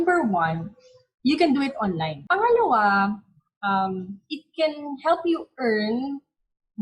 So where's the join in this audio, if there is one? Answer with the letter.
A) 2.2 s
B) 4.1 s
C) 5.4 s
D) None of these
A